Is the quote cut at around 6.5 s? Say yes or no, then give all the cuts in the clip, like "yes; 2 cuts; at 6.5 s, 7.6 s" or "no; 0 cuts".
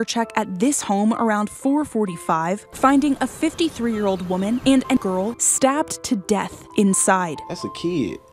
no; 1 cut; at 5.0 s